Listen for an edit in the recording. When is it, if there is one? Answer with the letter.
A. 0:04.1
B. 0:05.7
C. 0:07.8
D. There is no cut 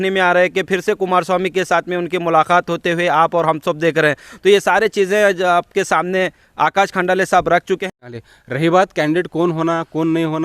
C